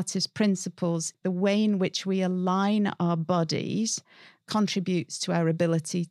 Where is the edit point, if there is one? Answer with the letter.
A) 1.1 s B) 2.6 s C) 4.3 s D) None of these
A